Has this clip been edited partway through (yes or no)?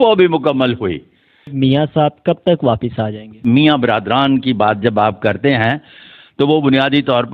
yes